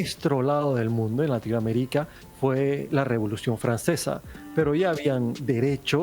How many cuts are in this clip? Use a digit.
2